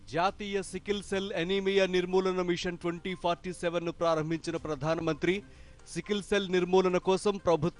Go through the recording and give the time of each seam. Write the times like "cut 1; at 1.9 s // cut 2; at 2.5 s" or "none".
none